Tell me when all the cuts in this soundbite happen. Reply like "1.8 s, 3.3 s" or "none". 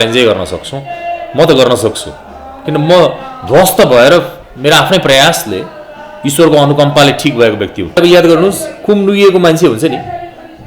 7.9 s

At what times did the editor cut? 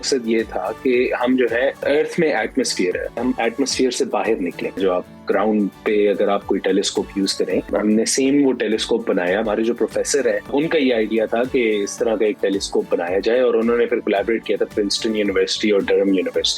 1.8 s, 3.2 s, 4.8 s, 7.7 s, 9.4 s, 10.5 s

